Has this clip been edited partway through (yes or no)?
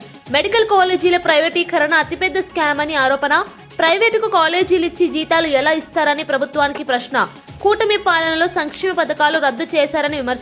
no